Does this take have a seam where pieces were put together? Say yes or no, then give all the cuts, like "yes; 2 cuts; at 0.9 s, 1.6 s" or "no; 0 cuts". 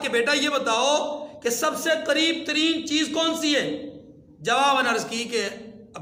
no; 0 cuts